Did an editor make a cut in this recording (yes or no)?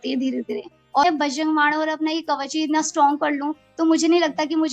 yes